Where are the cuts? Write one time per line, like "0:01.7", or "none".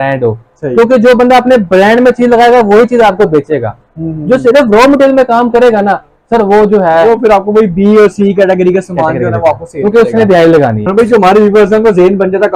none